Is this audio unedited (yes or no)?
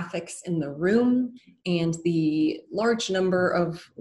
yes